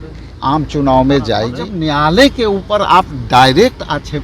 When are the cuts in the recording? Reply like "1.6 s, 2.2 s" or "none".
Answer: 1.7 s